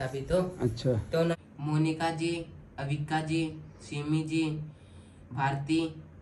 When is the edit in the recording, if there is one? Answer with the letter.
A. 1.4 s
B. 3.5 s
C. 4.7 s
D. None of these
A